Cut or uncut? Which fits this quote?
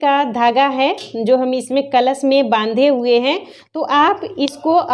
uncut